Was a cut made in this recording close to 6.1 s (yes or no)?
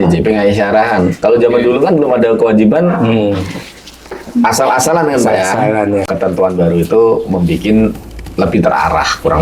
yes